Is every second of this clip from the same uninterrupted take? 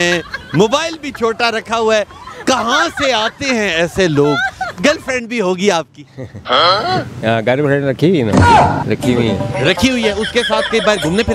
no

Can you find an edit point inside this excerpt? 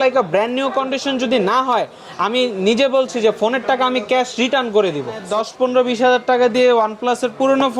yes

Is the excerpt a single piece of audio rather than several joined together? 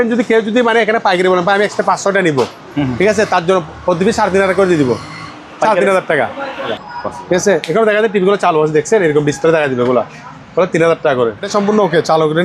no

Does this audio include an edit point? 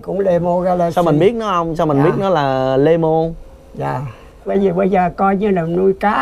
yes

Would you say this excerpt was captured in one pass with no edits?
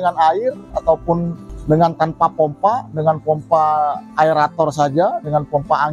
yes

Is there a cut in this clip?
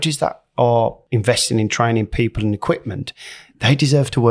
yes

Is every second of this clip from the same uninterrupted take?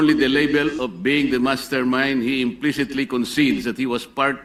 yes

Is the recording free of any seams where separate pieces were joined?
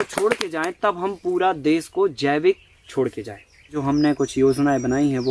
no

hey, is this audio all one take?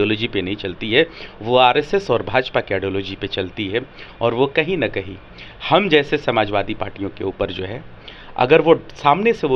yes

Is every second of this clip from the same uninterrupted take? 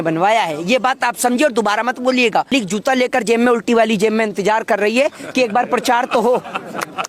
no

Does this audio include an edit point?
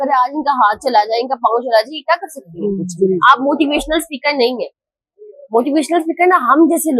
yes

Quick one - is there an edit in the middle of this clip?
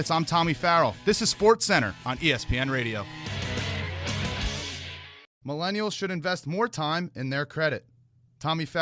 yes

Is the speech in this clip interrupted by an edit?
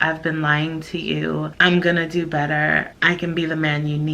yes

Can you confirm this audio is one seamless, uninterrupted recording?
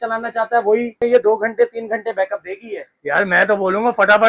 no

